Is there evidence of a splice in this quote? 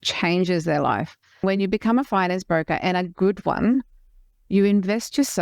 yes; 1 cut; at 1.4 s

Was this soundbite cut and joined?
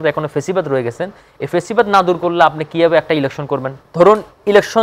yes; 1 cut; at 3.7 s

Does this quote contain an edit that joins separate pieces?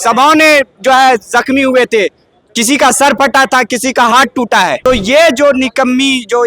yes; 1 cut; at 4.9 s

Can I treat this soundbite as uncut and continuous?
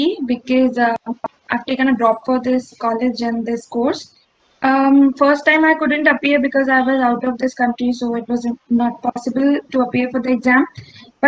yes; 0 cuts

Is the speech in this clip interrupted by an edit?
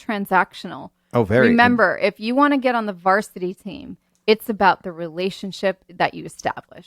yes; 1 cut; at 5.9 s

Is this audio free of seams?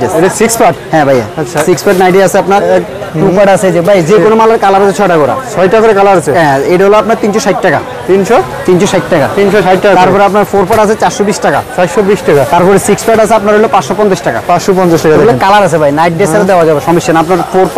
yes; 0 cuts

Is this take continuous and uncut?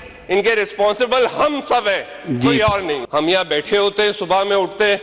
no; 1 cut; at 3.0 s

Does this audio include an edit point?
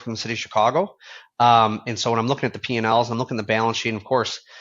no; 0 cuts

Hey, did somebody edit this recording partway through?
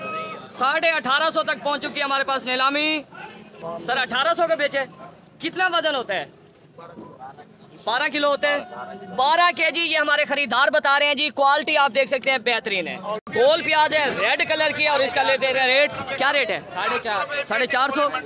yes; 1 cut; at 13.3 s

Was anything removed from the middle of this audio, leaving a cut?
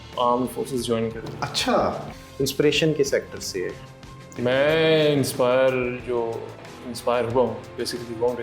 yes; 2 cuts; at 2.2 s, 4.4 s

